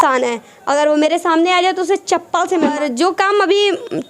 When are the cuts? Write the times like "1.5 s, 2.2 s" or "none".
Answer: 2.7 s